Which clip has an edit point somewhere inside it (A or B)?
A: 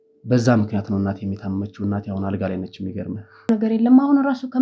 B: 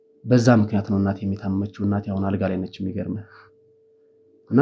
A